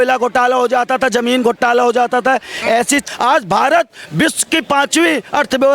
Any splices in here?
yes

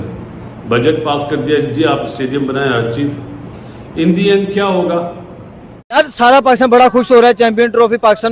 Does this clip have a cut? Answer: yes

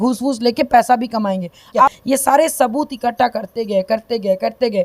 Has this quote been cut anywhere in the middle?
yes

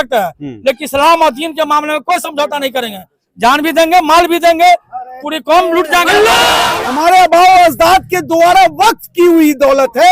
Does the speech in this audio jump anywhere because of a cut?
yes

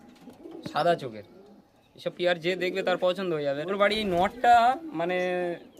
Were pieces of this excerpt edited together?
yes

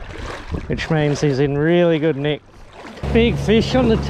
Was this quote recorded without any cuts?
no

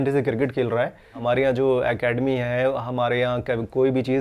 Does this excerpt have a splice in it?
yes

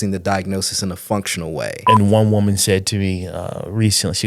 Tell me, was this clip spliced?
yes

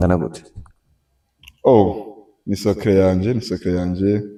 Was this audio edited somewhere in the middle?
no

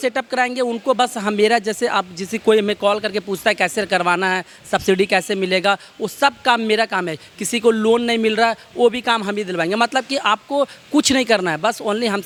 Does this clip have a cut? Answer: no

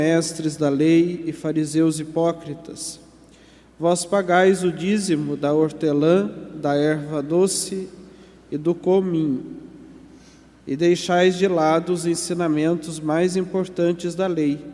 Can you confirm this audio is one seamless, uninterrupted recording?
yes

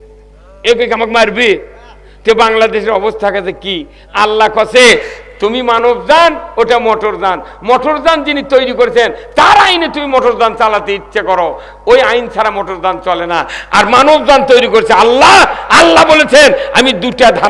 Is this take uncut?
yes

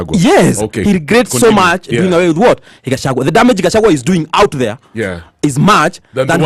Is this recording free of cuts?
yes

